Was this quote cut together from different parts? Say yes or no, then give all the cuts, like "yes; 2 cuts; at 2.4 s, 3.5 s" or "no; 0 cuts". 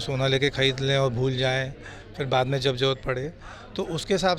no; 0 cuts